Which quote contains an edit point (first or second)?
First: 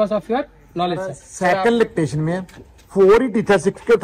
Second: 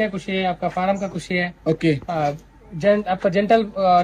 first